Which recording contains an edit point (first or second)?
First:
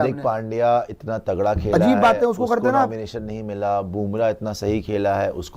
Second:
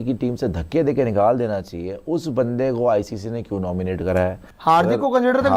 second